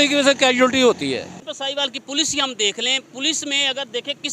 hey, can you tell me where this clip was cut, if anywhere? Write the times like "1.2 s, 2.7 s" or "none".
1.6 s